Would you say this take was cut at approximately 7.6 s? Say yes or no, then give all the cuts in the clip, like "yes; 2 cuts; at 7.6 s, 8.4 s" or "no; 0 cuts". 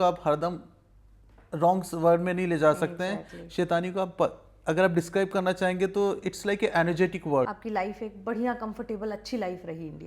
yes; 1 cut; at 7.6 s